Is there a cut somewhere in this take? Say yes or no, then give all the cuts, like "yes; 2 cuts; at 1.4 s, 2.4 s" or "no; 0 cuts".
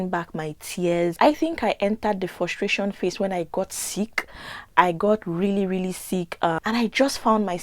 yes; 1 cut; at 6.3 s